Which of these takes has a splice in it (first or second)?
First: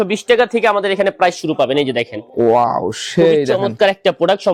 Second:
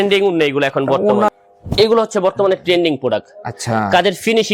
second